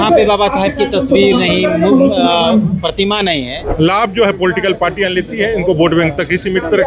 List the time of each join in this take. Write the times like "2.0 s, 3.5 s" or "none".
3.6 s